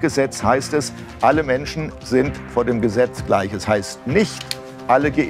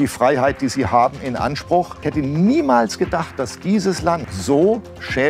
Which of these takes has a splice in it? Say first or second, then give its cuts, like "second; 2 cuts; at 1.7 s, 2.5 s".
second; 2 cuts; at 2.0 s, 4.3 s